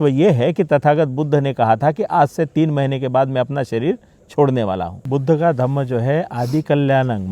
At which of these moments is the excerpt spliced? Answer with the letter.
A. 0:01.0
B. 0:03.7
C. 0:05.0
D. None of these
C